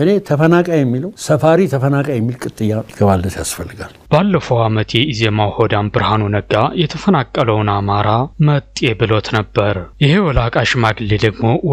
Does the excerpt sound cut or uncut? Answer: uncut